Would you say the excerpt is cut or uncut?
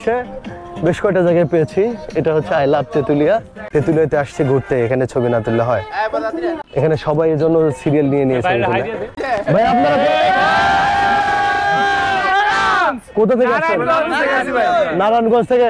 cut